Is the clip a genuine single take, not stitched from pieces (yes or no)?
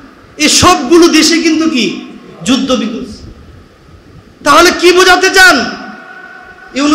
yes